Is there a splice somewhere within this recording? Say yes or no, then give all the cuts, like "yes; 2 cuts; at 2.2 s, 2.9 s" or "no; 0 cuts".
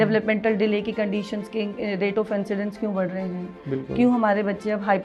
no; 0 cuts